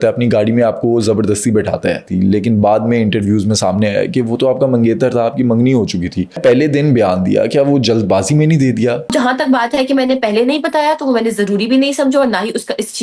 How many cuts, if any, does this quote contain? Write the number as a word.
three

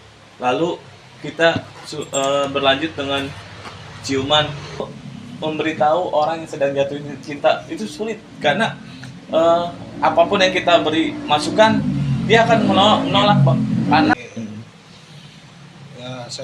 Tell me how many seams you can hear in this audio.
two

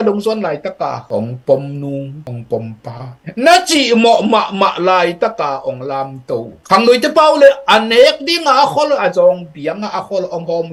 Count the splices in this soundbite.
zero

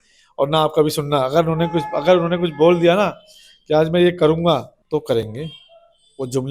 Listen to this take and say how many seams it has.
one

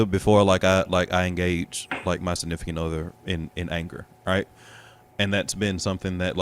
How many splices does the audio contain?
zero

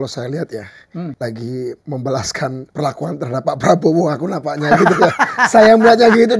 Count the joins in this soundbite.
three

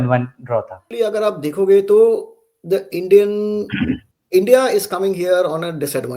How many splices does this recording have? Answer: one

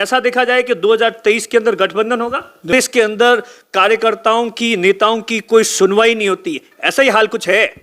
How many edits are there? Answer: one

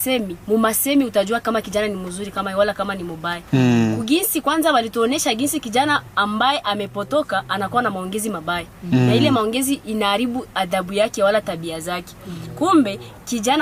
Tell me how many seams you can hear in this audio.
zero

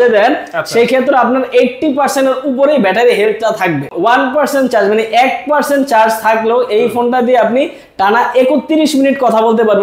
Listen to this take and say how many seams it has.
one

